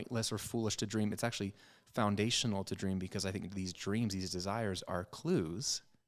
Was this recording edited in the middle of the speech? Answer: no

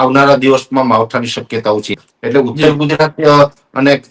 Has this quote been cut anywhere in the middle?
no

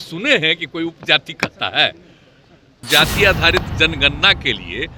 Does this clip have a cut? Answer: yes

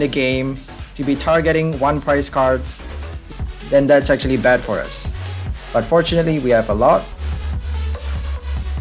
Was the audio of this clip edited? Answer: yes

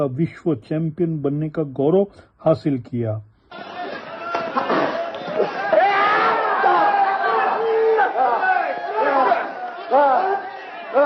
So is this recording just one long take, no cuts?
yes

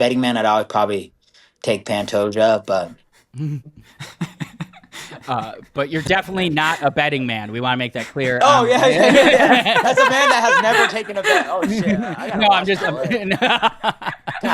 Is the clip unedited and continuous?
no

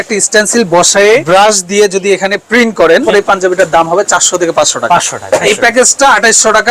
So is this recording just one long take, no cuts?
no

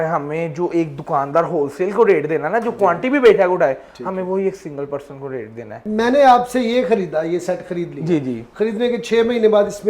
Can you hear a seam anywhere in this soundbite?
yes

